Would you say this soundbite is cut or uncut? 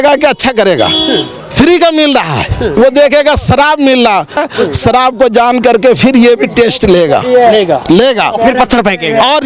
cut